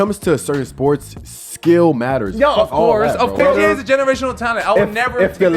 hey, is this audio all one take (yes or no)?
no